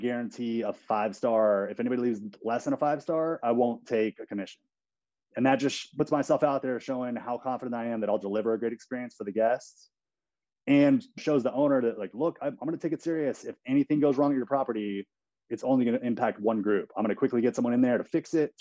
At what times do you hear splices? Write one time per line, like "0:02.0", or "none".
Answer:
0:05.9
0:11.1